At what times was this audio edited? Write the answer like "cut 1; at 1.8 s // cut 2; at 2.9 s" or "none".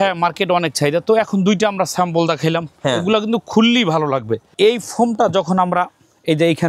cut 1; at 4.5 s